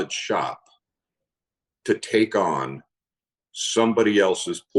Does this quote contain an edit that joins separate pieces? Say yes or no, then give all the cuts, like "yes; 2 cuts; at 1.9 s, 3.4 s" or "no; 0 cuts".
no; 0 cuts